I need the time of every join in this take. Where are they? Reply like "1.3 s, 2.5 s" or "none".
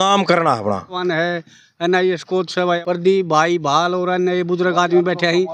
1.0 s, 2.8 s